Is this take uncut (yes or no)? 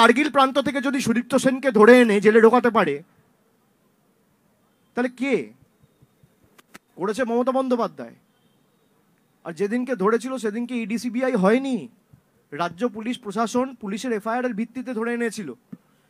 yes